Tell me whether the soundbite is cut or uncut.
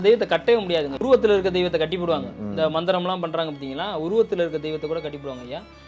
cut